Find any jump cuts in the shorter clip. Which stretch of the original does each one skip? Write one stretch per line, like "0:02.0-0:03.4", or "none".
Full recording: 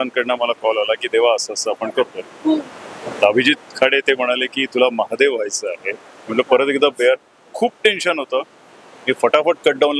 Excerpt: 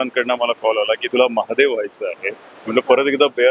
0:01.0-0:04.7